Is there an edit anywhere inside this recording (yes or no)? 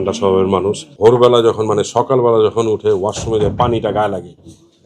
yes